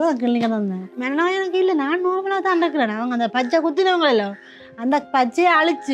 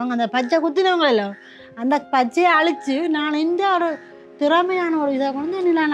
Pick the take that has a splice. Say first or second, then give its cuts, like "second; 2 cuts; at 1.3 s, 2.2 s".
first; 1 cut; at 1.0 s